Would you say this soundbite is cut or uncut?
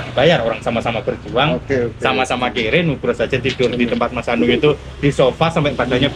uncut